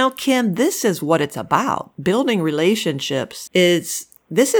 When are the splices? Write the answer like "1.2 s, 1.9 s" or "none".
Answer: 3.4 s